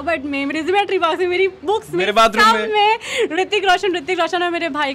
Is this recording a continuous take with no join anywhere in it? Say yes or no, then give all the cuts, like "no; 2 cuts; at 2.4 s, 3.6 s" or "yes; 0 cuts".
yes; 0 cuts